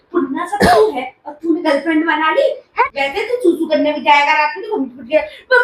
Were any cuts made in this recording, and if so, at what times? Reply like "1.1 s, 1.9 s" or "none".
2.8 s